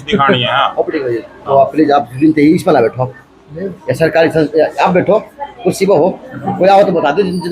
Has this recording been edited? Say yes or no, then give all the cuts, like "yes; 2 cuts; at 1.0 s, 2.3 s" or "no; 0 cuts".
no; 0 cuts